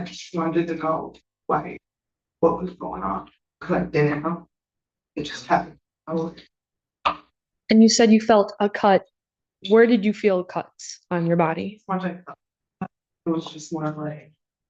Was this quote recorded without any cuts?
yes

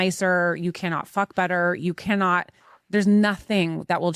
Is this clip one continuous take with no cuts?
yes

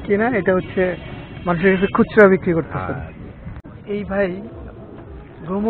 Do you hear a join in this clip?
yes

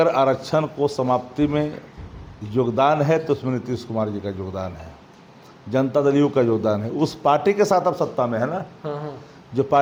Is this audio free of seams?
yes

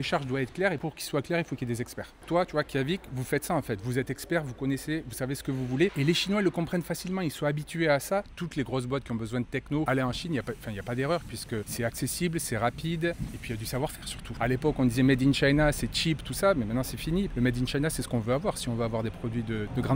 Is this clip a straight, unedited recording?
no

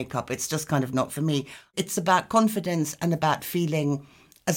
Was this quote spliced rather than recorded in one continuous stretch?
yes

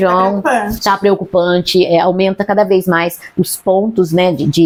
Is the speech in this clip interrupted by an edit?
no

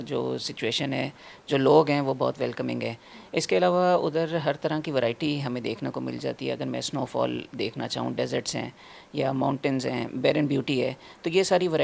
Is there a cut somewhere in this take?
no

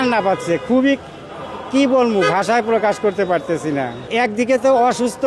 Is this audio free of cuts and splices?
no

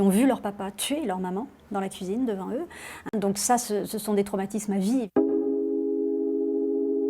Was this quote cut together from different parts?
yes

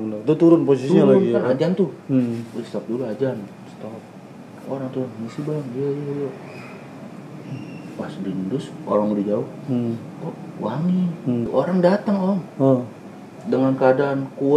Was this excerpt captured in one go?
no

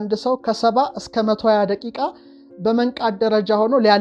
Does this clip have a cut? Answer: no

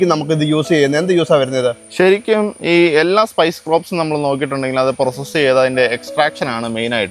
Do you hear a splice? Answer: no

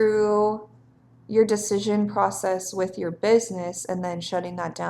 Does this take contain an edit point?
no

